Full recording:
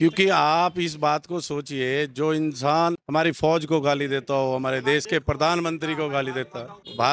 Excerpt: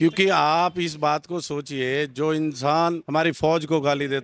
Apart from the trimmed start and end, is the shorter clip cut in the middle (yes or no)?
no